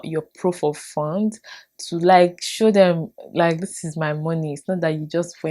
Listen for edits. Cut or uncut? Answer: uncut